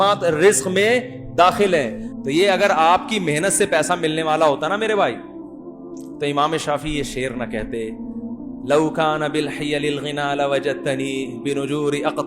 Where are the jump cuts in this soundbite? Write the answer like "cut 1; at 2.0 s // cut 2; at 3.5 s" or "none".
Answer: cut 1; at 2.0 s